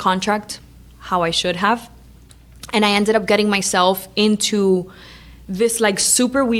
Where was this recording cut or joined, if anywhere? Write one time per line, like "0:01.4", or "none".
none